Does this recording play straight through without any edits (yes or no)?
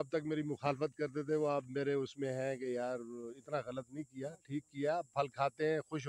yes